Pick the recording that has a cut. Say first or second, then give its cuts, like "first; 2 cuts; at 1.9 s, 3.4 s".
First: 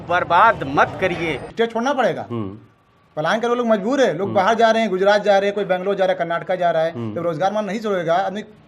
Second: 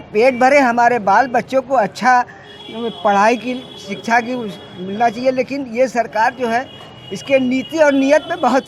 first; 1 cut; at 1.4 s